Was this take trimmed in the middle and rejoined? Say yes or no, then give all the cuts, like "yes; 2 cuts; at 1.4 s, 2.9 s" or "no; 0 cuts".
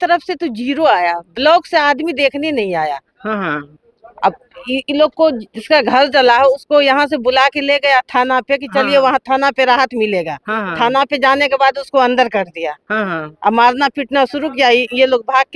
no; 0 cuts